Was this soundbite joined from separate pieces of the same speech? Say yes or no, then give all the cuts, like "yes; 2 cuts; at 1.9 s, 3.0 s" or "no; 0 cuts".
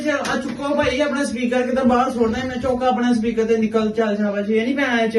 no; 0 cuts